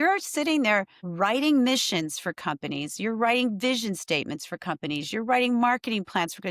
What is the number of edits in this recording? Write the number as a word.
one